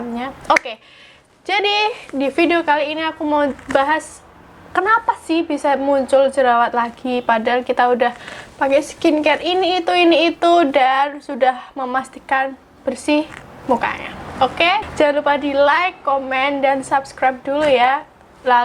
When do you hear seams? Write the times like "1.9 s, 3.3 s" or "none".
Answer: 14.8 s